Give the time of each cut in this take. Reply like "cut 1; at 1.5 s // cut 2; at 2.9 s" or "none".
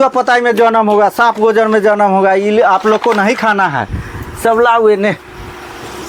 none

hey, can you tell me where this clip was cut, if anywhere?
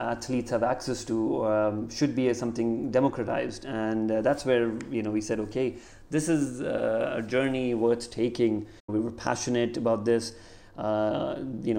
cut 1; at 8.9 s

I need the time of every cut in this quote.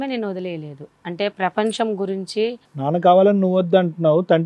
cut 1; at 2.6 s

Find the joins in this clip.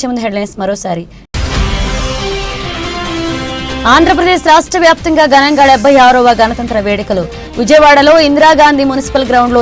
cut 1; at 1.3 s // cut 2; at 3.6 s

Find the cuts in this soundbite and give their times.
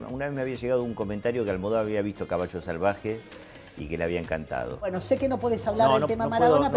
cut 1; at 4.8 s

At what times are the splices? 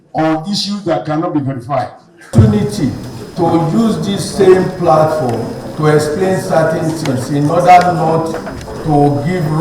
cut 1; at 2.2 s

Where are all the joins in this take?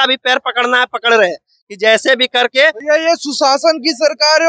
none

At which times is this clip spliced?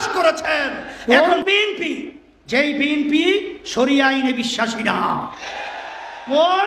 cut 1; at 0.9 s

